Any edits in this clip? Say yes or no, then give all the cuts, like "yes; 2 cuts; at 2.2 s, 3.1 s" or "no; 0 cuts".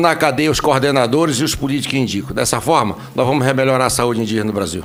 no; 0 cuts